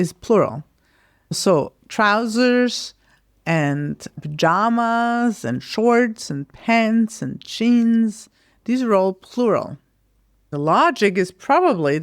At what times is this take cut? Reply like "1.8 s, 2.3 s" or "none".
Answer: 1.2 s